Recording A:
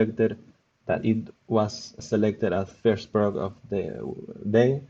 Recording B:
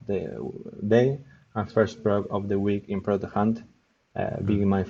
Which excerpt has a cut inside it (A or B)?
A